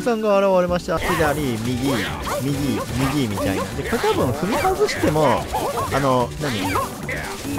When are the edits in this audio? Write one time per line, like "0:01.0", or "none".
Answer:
0:01.0